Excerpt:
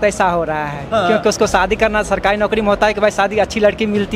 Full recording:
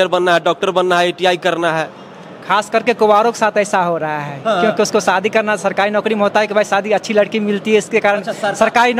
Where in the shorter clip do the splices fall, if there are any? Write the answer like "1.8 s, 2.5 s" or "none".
none